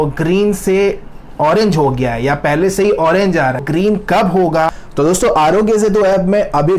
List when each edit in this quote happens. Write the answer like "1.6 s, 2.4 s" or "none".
3.6 s, 4.8 s